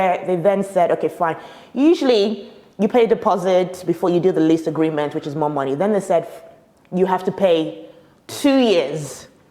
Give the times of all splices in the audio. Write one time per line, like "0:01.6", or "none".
none